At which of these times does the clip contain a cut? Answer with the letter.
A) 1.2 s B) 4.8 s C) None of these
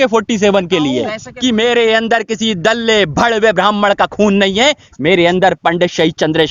A